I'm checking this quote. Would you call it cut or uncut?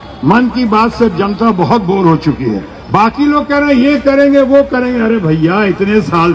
cut